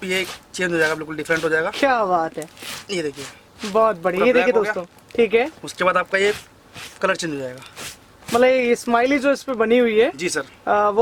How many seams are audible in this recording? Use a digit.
0